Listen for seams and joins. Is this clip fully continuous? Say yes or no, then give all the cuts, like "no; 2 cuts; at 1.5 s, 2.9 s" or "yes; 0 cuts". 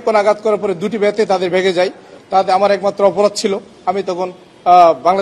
no; 1 cut; at 2.1 s